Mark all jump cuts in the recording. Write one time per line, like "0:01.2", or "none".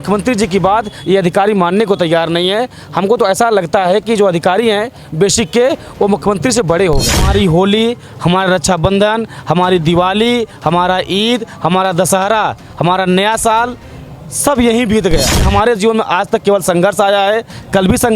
0:07.3
0:15.5